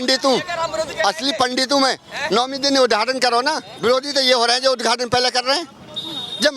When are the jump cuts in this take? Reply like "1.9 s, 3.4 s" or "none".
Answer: 3.7 s